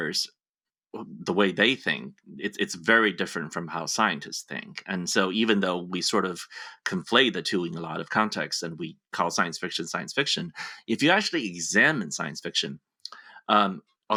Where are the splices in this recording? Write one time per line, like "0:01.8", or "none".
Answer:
none